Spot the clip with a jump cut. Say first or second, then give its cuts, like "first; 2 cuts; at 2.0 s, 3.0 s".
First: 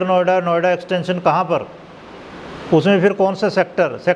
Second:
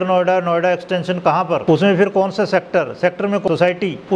second; 2 cuts; at 1.6 s, 3.5 s